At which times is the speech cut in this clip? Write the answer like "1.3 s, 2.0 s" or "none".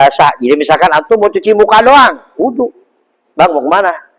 none